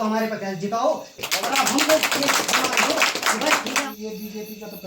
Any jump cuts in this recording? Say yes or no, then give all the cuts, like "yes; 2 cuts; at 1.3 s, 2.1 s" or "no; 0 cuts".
yes; 2 cuts; at 1.2 s, 3.9 s